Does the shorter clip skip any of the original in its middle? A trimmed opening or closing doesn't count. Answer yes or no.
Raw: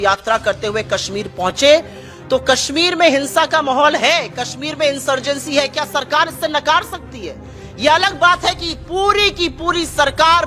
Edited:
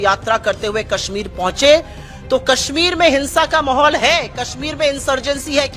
no